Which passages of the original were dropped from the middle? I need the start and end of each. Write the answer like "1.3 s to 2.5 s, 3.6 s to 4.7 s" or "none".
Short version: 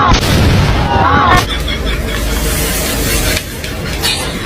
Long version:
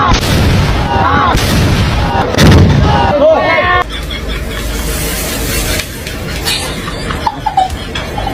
1.3 s to 3.7 s